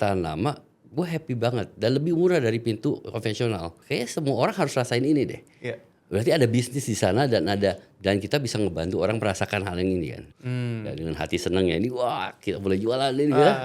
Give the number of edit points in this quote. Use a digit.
2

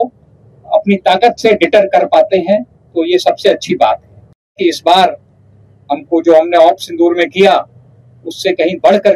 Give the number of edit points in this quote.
1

